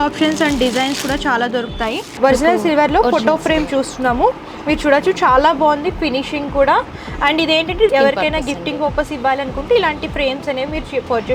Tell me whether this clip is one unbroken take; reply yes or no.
no